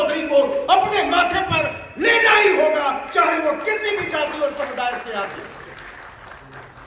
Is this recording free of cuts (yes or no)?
yes